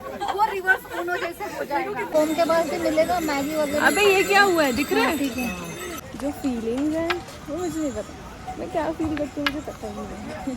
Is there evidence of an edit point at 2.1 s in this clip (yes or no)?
yes